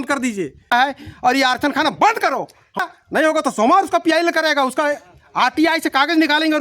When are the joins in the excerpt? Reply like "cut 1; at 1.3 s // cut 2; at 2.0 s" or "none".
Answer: cut 1; at 0.7 s // cut 2; at 2.8 s